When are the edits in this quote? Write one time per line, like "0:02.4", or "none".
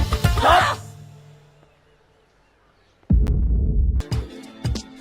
0:04.0